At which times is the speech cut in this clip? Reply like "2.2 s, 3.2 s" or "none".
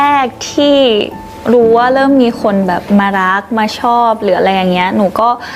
none

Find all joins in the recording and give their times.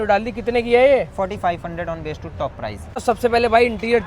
3.0 s

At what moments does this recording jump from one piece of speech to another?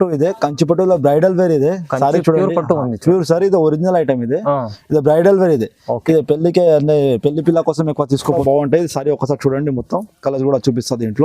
8.4 s

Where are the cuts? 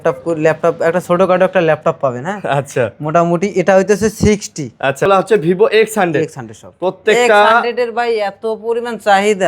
5.0 s

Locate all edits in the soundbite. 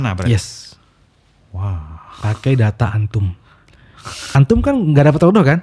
4.2 s

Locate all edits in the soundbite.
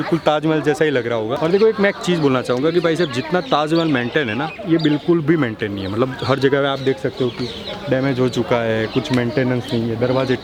none

